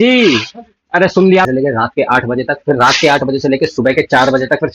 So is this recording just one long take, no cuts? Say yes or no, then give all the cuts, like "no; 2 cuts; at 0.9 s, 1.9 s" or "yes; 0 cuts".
no; 1 cut; at 1.5 s